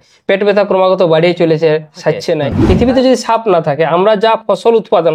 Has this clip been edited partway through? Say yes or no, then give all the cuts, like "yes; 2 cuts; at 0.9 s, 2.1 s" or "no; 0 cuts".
yes; 1 cut; at 2.5 s